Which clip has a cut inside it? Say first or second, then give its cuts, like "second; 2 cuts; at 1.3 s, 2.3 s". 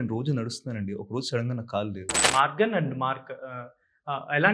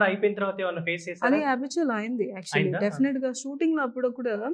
first; 1 cut; at 2.2 s